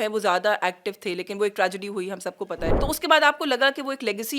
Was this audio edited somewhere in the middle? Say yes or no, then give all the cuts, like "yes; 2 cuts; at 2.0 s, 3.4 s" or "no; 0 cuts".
yes; 1 cut; at 2.7 s